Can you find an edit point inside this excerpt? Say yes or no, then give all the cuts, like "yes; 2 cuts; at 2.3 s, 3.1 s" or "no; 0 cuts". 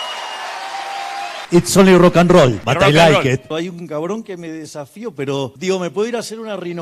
yes; 4 cuts; at 1.4 s, 2.6 s, 3.5 s, 5.6 s